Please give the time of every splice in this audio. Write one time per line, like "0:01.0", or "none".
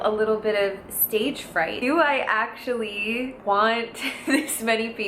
0:01.8